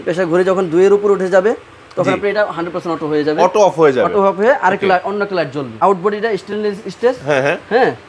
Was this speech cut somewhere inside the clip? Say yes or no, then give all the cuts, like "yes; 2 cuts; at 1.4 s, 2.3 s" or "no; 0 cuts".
yes; 1 cut; at 5.8 s